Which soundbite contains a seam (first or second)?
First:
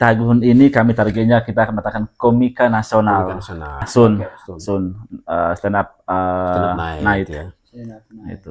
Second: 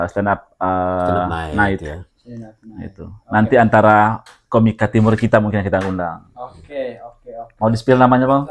first